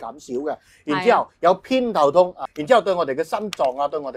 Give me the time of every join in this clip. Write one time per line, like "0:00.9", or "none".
0:02.4